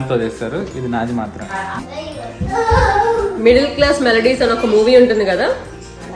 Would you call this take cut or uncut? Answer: cut